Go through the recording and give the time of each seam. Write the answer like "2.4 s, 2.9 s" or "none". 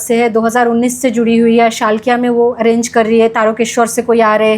none